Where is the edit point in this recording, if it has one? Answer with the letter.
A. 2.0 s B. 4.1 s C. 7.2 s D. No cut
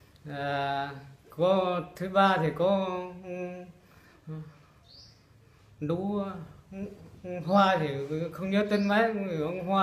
B